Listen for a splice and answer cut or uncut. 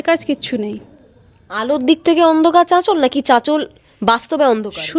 uncut